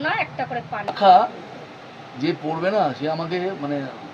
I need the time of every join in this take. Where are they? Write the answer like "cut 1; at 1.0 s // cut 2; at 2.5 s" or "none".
cut 1; at 1.0 s